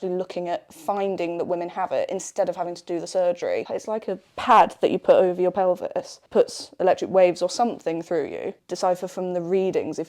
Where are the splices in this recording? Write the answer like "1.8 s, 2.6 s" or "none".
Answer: 3.7 s, 6.2 s, 8.6 s